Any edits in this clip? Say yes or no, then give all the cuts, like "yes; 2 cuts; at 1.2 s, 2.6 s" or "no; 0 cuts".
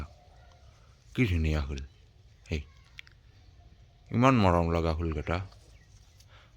no; 0 cuts